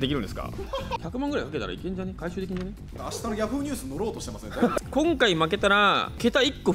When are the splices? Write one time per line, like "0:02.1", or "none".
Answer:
0:01.0
0:03.0
0:04.8

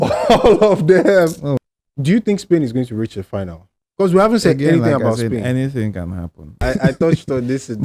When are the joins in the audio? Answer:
0:01.5
0:06.6

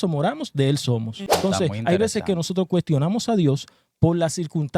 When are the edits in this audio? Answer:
0:01.2

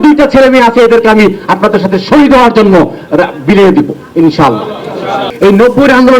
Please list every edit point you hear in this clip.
0:05.3

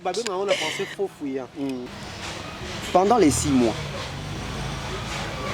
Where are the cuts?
0:01.8

